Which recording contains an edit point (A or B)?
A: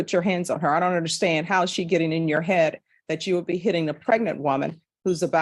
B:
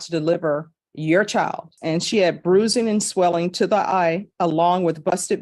B